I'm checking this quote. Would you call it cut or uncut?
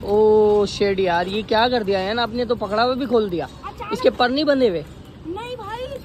uncut